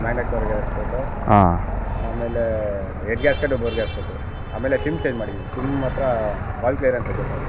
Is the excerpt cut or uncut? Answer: uncut